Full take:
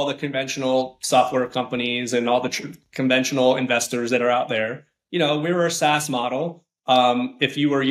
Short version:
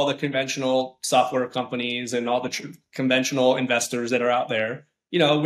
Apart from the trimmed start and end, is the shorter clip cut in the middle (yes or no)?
no